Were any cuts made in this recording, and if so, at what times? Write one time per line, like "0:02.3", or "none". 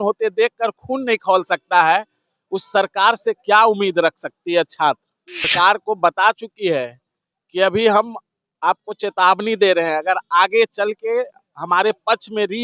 0:05.5